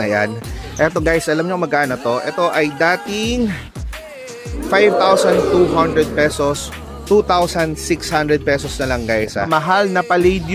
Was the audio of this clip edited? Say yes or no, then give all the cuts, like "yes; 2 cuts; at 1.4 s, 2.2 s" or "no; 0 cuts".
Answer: yes; 1 cut; at 9.4 s